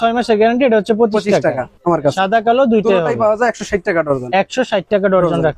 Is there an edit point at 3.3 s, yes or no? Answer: no